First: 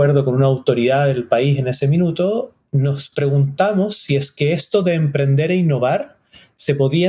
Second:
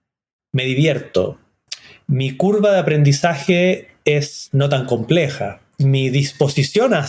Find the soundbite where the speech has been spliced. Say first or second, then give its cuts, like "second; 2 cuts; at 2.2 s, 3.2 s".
second; 2 cuts; at 4.4 s, 5.6 s